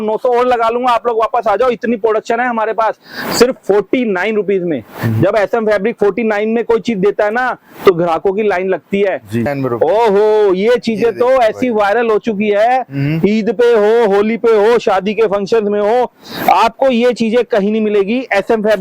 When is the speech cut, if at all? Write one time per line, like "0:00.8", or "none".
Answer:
0:09.5